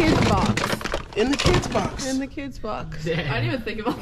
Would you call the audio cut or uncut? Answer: uncut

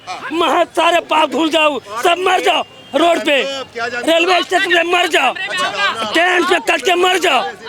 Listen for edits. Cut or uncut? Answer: uncut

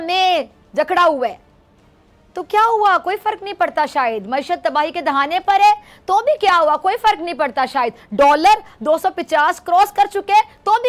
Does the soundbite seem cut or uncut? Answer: uncut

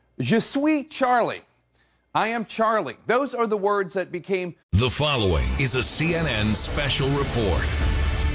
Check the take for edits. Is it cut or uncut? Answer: uncut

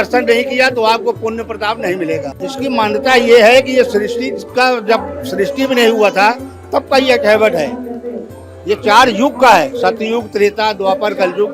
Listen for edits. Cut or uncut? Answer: cut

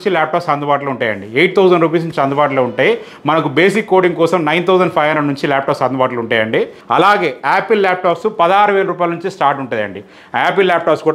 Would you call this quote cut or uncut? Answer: cut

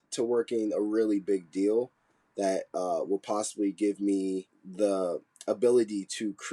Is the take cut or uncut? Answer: cut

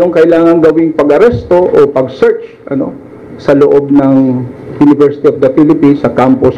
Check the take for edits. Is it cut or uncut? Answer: uncut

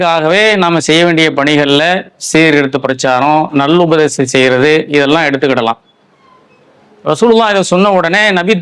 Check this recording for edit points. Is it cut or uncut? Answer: uncut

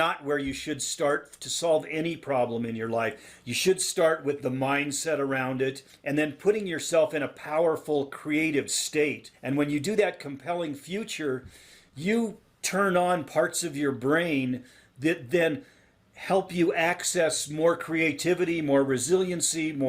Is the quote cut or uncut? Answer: cut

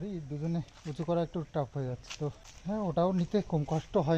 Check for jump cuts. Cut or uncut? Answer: cut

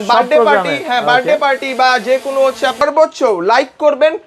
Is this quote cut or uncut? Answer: cut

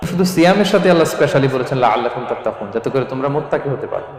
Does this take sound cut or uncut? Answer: uncut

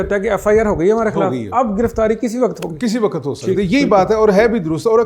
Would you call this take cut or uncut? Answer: uncut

